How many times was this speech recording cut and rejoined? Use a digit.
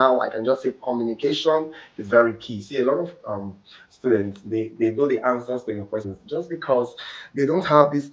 1